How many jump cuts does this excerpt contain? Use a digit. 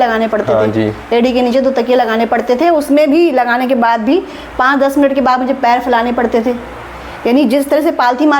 0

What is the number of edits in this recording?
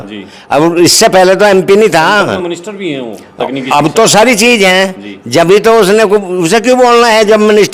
0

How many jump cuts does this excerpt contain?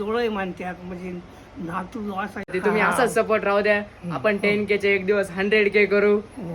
1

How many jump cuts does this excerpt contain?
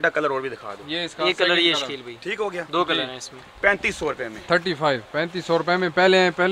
0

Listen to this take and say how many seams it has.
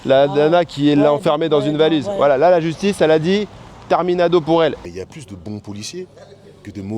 1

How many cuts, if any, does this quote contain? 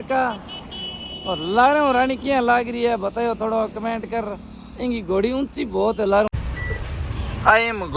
1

